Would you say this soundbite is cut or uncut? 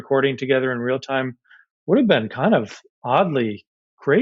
uncut